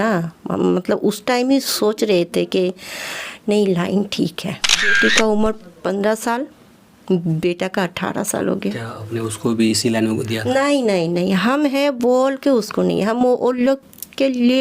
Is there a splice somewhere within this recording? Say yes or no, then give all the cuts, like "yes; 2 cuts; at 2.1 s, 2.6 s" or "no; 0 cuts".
yes; 1 cut; at 5.0 s